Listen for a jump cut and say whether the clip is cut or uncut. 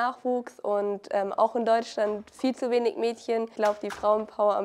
cut